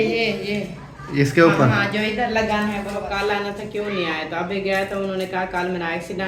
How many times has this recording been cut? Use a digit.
1